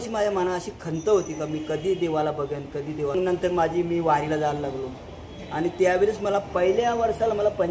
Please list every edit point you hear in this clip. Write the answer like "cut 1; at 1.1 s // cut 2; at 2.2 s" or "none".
cut 1; at 3.2 s